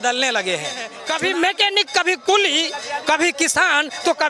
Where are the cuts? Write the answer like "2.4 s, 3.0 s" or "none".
0.9 s